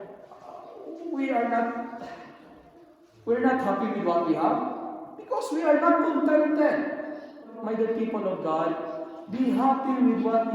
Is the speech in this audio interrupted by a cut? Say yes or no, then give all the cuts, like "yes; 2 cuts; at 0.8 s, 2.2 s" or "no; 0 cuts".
yes; 1 cut; at 7.5 s